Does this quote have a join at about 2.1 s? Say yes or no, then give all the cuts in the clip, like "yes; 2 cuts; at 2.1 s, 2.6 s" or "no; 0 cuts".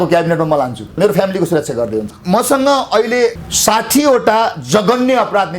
yes; 3 cuts; at 1.0 s, 2.1 s, 3.4 s